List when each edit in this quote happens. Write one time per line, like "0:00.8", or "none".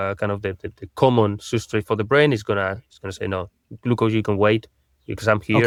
none